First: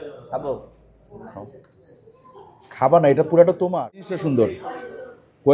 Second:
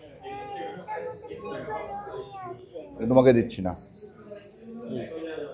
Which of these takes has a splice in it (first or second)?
first